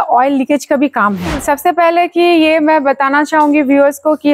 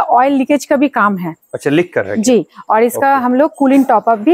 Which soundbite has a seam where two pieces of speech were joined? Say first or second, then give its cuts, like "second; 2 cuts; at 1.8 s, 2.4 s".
first; 1 cut; at 1.4 s